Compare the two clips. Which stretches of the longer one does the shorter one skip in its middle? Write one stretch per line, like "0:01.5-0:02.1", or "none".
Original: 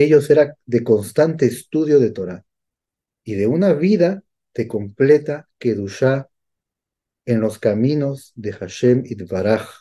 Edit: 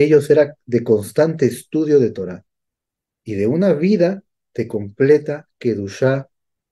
none